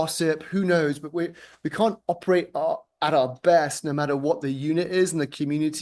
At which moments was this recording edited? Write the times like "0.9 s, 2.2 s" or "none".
none